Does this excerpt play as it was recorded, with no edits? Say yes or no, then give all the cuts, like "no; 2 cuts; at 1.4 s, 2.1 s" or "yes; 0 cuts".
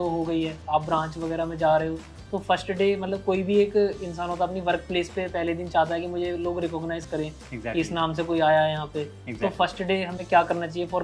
yes; 0 cuts